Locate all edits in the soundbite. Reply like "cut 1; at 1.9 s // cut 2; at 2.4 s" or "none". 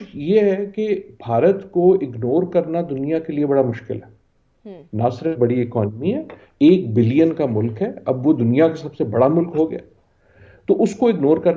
none